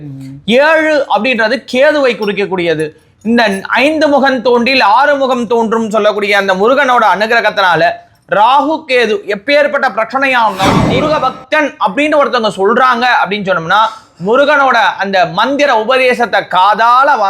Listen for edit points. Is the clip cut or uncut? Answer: cut